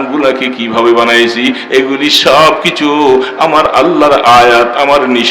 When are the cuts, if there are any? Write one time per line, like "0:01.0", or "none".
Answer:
none